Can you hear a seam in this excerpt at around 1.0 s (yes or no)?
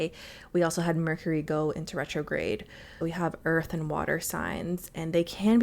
no